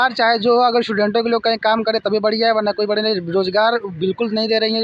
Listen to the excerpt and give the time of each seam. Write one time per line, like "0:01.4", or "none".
none